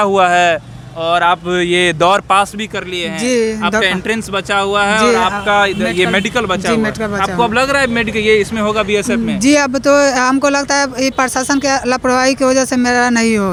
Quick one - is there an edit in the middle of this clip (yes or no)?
no